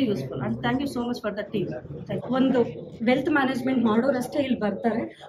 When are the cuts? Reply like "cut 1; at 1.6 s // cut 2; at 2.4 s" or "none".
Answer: cut 1; at 2.2 s